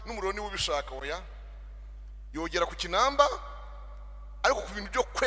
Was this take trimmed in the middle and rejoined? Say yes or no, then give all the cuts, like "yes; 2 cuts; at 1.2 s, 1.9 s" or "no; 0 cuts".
no; 0 cuts